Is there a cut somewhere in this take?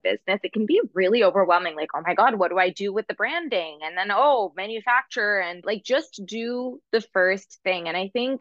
yes; 1 cut; at 5.6 s

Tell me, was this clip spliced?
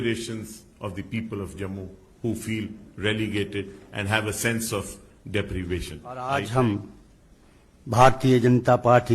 yes; 1 cut; at 6.2 s

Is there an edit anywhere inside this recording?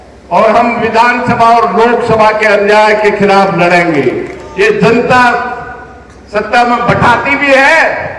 yes; 1 cut; at 4.4 s

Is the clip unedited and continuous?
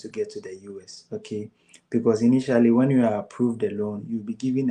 yes; 0 cuts

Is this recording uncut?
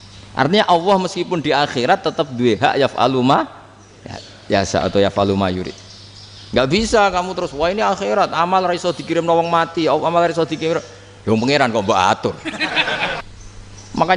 no; 1 cut; at 13.2 s

